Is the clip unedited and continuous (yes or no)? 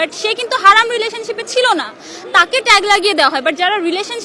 yes